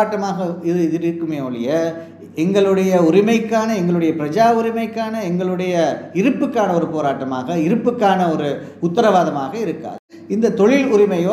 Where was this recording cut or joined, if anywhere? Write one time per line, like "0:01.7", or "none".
0:10.2